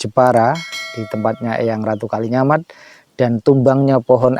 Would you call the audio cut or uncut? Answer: uncut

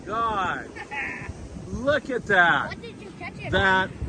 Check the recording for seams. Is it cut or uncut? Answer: uncut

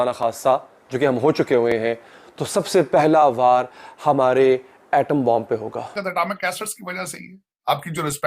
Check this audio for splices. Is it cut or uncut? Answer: cut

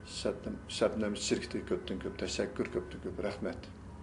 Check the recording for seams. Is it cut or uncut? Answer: uncut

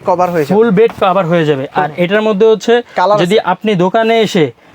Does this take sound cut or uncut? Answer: uncut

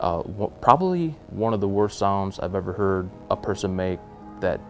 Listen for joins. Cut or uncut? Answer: cut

